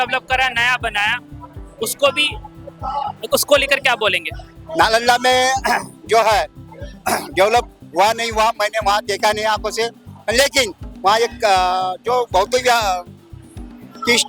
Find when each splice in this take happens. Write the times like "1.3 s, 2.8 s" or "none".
none